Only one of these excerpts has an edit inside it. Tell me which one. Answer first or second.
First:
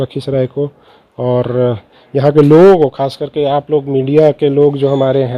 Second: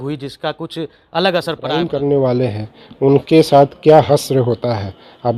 second